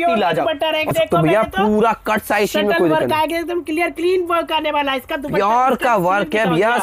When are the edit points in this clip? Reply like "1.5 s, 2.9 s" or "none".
0.9 s